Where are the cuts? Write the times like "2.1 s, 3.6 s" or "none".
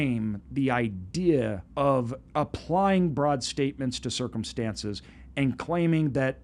1.6 s, 2.2 s